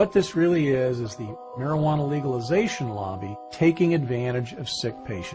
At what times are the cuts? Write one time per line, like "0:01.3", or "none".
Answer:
0:04.3